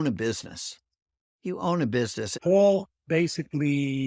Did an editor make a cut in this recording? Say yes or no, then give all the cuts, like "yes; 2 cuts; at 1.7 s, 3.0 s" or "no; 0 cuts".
yes; 1 cut; at 2.3 s